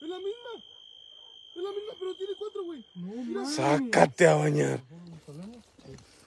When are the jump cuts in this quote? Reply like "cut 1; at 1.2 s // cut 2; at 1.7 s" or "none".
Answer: cut 1; at 5.0 s